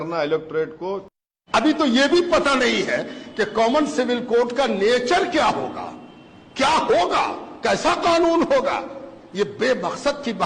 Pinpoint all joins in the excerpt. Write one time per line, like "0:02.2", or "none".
0:01.0